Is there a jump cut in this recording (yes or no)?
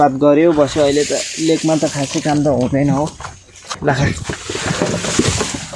yes